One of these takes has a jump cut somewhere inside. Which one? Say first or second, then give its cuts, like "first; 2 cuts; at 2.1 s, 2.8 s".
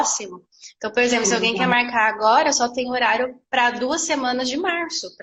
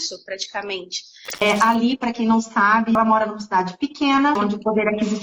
second; 3 cuts; at 1.4 s, 3.0 s, 4.4 s